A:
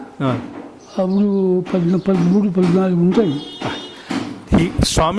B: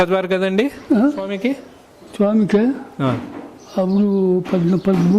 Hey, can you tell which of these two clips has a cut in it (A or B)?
B